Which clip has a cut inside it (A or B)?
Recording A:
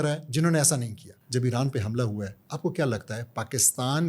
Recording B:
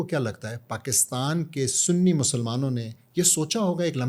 A